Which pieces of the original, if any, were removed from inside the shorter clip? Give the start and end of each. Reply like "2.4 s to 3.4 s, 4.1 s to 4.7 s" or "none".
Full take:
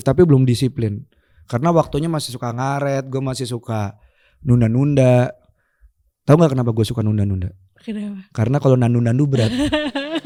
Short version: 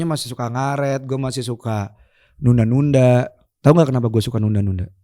5.5 s to 6.1 s